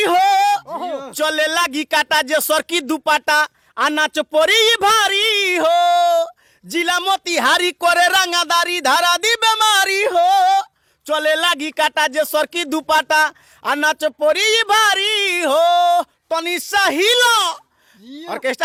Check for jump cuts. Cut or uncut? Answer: uncut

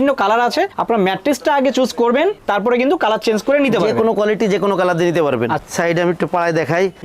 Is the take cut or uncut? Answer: cut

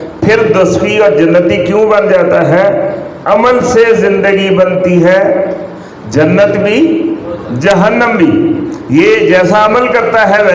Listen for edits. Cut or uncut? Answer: uncut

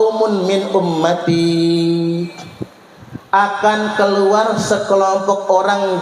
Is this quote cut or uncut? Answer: uncut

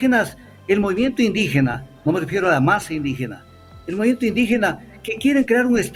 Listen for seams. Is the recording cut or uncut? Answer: uncut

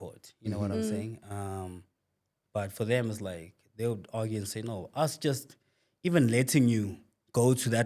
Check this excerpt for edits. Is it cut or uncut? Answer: uncut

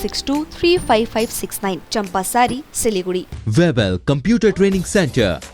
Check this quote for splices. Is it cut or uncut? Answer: cut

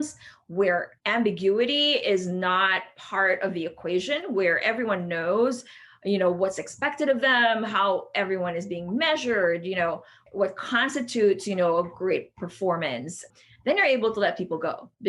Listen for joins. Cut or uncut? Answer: cut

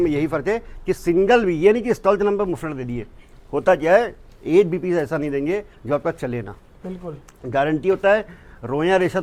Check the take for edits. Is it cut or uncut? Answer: uncut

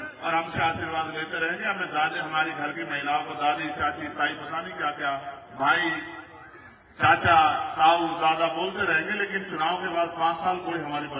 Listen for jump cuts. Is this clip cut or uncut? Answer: uncut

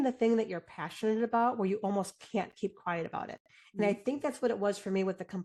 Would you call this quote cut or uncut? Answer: uncut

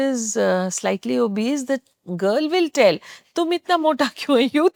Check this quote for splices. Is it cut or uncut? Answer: uncut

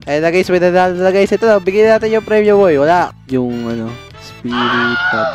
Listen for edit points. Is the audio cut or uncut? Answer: cut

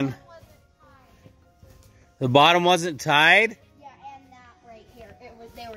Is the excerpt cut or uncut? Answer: uncut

